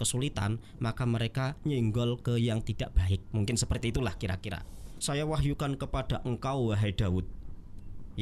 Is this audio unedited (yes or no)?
no